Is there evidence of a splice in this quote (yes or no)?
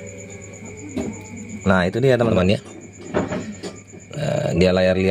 yes